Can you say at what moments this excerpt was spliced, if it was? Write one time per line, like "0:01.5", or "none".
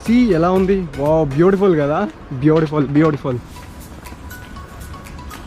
none